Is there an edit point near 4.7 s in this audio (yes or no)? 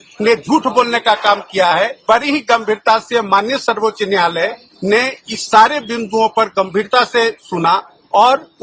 no